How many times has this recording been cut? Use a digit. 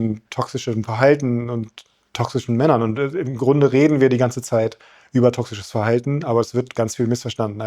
0